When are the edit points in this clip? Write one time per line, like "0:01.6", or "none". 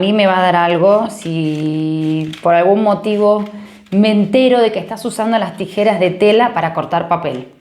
none

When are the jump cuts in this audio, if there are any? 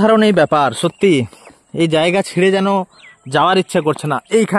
none

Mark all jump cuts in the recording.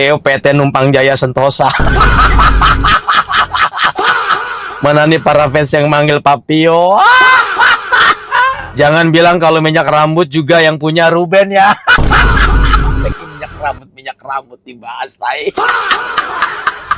none

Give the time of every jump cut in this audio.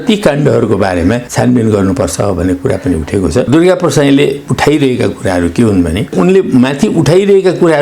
0:01.3
0:03.5
0:06.1

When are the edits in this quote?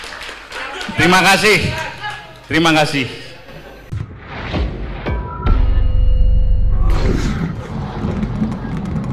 0:03.8

